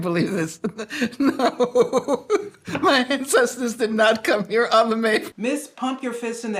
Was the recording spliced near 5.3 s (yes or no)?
yes